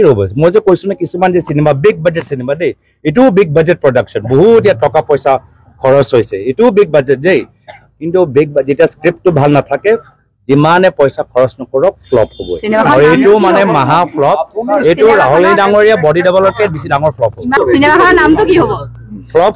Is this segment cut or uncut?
cut